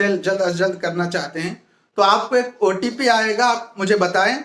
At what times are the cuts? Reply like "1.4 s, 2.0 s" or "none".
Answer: none